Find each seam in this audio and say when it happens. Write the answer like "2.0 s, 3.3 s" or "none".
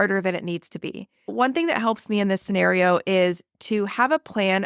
1.3 s